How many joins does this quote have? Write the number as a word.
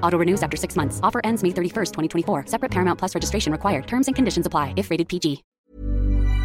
one